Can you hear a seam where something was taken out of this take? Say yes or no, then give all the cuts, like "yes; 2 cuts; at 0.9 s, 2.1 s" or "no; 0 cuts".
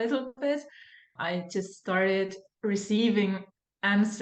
yes; 1 cut; at 1.1 s